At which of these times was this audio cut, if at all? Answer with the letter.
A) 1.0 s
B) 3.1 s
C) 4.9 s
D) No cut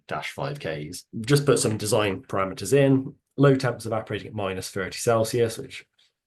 A